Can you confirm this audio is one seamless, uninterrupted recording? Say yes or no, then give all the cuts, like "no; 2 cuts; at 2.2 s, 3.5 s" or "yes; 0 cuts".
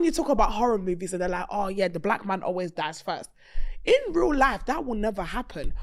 yes; 0 cuts